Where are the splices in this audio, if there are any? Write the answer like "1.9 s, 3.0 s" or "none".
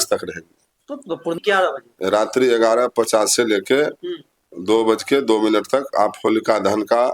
1.4 s